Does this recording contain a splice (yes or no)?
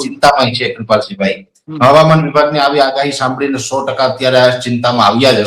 no